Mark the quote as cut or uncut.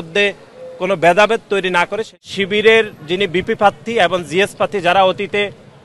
cut